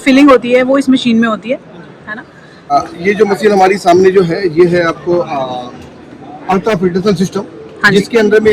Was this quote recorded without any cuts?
no; 1 cut; at 2.7 s

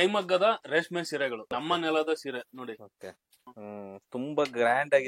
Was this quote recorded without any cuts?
no; 2 cuts; at 1.5 s, 3.5 s

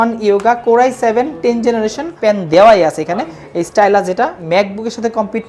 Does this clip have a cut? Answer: yes; 2 cuts; at 2.1 s, 4.4 s

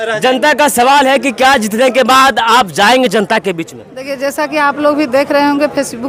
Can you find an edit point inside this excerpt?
no; 0 cuts

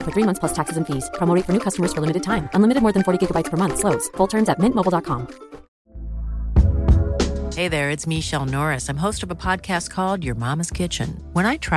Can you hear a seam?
yes; 1 cut; at 5.7 s

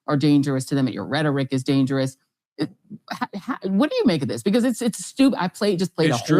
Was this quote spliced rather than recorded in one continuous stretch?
no; 0 cuts

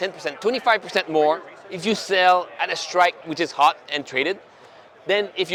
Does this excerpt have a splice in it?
no; 0 cuts

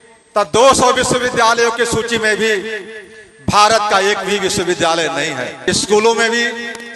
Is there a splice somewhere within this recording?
yes; 1 cut; at 5.5 s

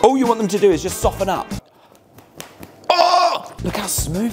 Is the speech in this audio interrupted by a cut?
yes; 2 cuts; at 1.7 s, 3.5 s

